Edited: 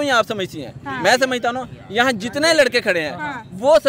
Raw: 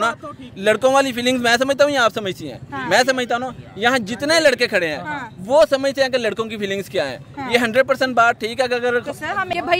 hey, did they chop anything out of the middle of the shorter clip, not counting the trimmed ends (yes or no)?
no